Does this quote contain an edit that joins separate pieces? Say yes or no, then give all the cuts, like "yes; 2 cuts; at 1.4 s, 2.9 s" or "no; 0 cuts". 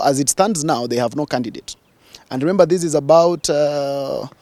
no; 0 cuts